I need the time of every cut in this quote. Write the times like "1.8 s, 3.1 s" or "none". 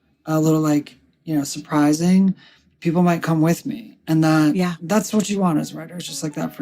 2.7 s